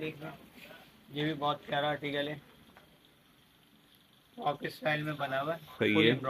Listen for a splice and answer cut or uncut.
uncut